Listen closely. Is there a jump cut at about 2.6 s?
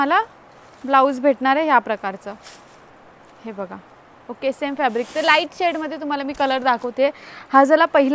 no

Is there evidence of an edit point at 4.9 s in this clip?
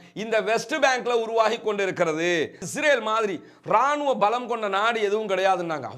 no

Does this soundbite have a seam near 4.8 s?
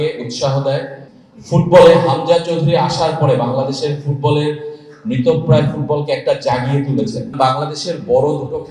no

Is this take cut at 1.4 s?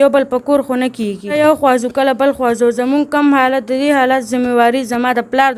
yes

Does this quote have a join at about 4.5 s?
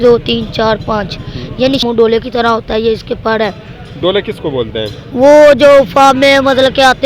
no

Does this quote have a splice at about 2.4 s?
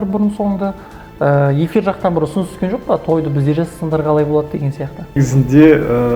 no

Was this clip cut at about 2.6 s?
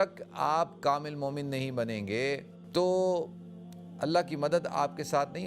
yes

